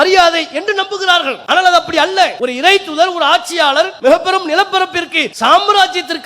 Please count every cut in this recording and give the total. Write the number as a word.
four